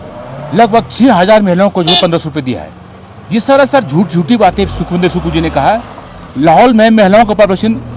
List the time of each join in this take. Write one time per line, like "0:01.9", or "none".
none